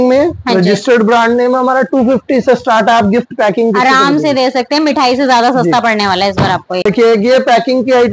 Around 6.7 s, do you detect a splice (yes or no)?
yes